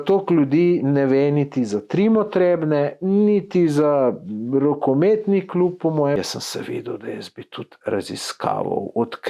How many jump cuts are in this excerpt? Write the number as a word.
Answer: one